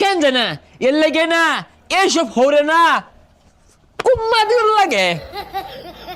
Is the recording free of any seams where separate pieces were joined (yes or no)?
no